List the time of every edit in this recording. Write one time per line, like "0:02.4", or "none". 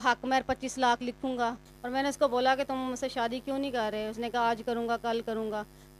0:01.7